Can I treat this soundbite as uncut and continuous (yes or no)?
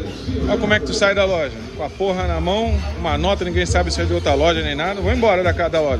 yes